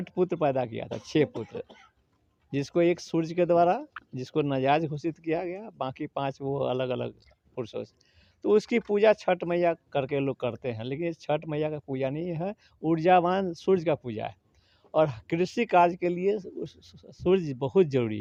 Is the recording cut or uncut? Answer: uncut